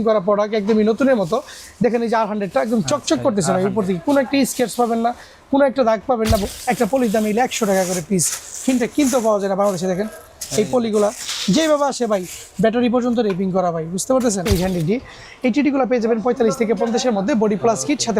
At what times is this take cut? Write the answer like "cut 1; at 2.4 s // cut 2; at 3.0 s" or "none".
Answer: cut 1; at 6.5 s // cut 2; at 14.5 s